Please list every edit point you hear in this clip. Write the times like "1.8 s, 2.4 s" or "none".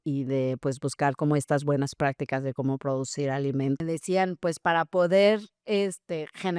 3.8 s